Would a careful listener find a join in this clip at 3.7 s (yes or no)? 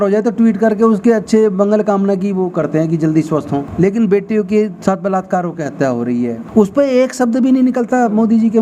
yes